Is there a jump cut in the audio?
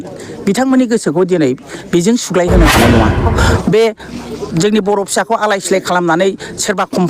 yes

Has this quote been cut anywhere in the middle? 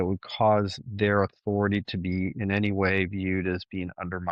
no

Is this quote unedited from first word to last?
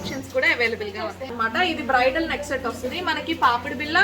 no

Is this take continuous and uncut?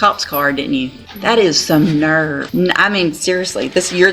no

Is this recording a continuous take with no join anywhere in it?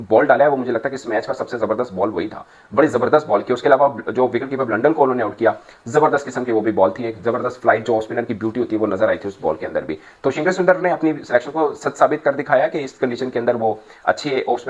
yes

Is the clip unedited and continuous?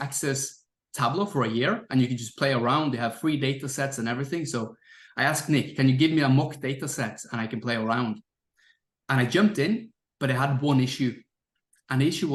yes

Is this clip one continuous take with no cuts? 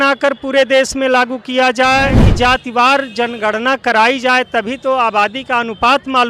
no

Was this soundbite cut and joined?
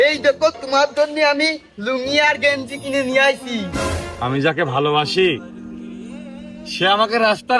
yes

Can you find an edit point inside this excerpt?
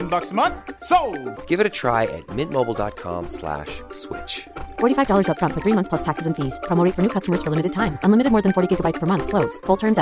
no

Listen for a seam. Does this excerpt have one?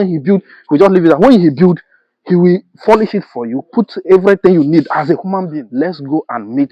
yes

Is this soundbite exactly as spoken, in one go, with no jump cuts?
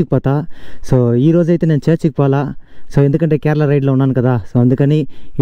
yes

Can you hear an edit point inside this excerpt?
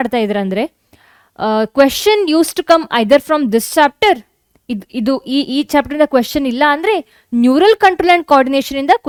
no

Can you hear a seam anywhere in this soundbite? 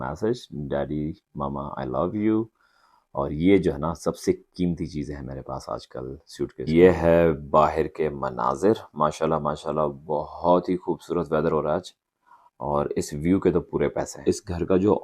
yes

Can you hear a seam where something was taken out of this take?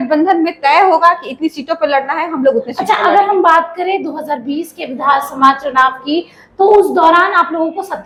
no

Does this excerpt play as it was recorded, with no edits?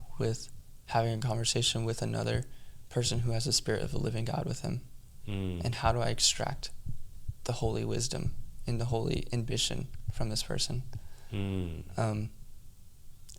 yes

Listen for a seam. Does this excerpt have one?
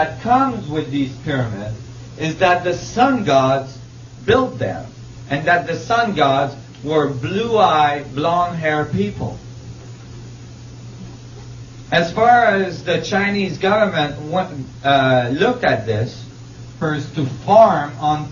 no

